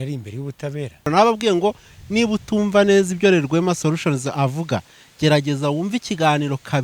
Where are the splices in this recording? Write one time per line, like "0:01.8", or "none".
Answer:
0:01.1